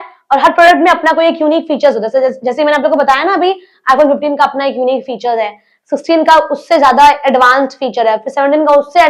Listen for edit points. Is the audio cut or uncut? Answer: uncut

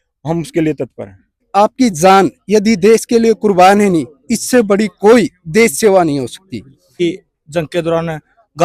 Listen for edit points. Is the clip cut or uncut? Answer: cut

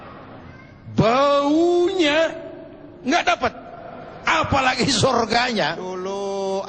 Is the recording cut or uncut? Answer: cut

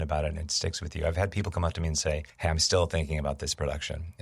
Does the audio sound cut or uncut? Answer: cut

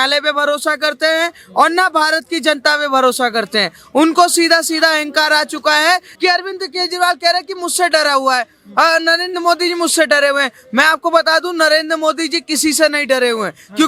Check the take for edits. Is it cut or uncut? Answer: cut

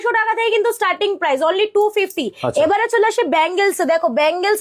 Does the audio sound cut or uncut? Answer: uncut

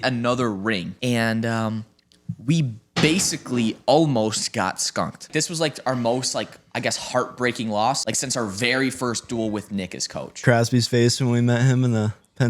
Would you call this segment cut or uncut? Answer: cut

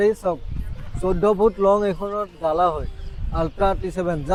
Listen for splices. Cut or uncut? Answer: uncut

